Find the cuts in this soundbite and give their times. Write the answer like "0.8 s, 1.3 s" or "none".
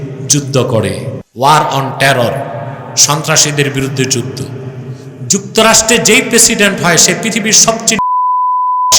1.2 s